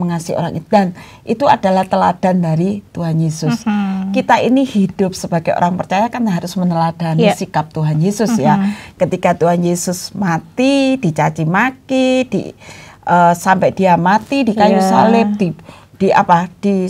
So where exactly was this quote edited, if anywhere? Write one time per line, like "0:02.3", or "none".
none

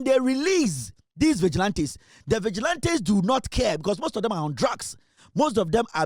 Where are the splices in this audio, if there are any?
none

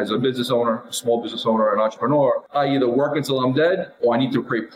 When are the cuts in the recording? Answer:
0:02.4

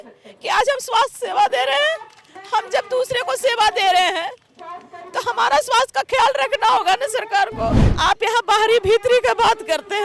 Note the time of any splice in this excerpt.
0:07.8

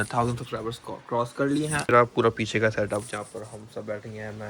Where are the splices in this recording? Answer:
0:01.8

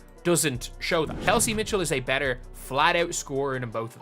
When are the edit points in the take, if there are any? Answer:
0:01.2

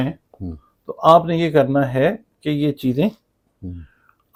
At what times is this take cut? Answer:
none

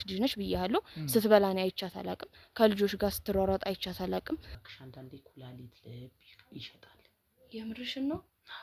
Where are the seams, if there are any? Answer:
0:04.5

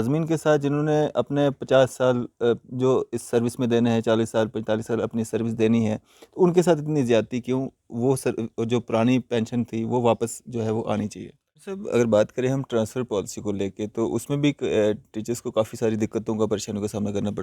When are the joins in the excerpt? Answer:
0:11.8

